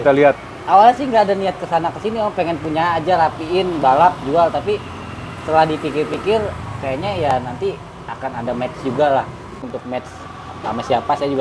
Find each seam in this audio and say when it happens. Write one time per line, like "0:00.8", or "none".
0:09.7

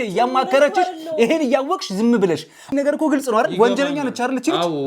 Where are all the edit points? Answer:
0:02.7

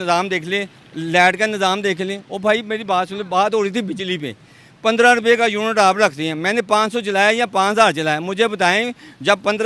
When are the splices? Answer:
none

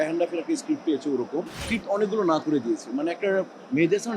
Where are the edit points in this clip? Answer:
0:01.7

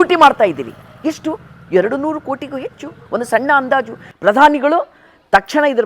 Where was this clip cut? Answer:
0:04.0

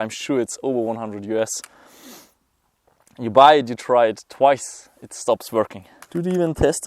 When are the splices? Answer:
0:06.0

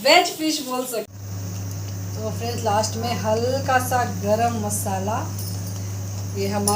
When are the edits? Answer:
0:01.1

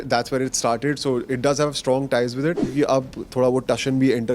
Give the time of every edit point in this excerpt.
0:02.6

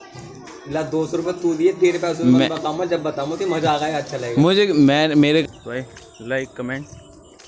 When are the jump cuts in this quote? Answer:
0:05.4

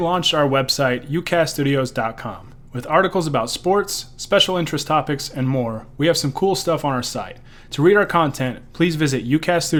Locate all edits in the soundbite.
none

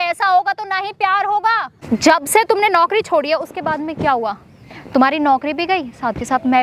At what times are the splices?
0:01.7

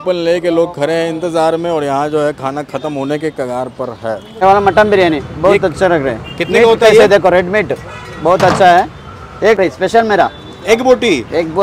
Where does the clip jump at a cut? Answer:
0:04.3
0:09.6

